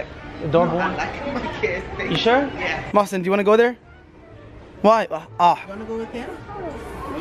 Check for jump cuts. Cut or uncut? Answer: cut